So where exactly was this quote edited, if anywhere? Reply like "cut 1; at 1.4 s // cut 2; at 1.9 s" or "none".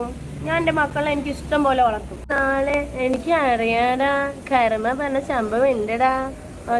cut 1; at 2.3 s